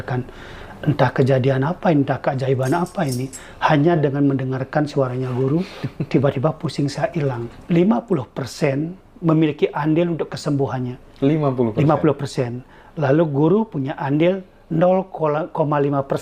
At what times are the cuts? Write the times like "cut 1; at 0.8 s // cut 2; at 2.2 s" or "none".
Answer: cut 1; at 7.5 s